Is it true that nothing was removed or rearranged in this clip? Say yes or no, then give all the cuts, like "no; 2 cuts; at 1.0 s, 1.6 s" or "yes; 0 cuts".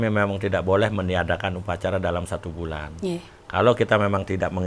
yes; 0 cuts